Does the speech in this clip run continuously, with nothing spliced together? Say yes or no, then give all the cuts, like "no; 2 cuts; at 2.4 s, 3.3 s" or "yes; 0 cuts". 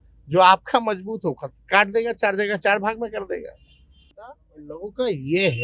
no; 1 cut; at 4.1 s